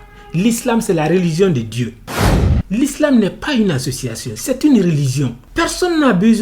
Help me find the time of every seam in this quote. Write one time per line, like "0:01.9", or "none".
0:02.2